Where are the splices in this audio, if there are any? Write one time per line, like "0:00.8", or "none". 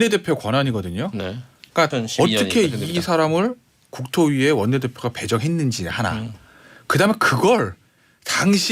0:01.9